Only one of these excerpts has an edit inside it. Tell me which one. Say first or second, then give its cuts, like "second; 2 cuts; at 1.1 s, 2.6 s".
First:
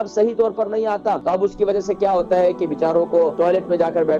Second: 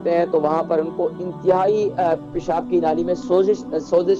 first; 2 cuts; at 1.2 s, 3.3 s